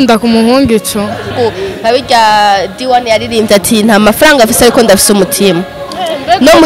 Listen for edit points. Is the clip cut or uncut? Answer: cut